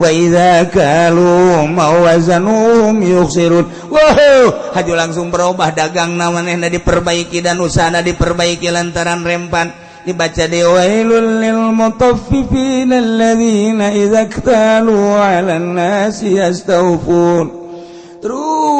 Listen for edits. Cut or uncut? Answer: uncut